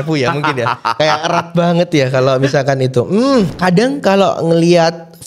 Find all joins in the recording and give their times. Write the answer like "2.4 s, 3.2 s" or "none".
3.5 s